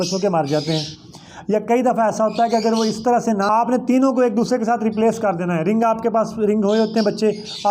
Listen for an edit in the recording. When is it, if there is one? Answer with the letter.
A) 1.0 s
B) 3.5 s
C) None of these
B